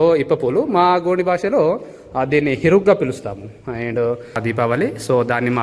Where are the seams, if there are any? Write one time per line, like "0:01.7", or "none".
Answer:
0:04.4